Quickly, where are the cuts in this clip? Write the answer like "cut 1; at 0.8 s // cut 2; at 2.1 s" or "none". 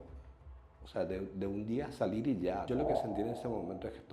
cut 1; at 2.6 s